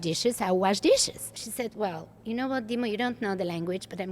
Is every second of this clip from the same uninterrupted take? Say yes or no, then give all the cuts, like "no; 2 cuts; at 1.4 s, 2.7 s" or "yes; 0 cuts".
no; 1 cut; at 1.5 s